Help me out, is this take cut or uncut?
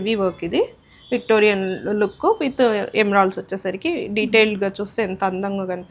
uncut